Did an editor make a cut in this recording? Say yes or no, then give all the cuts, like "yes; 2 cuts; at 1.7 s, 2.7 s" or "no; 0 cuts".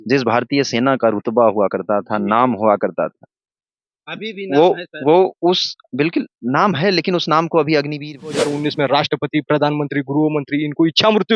yes; 1 cut; at 8.5 s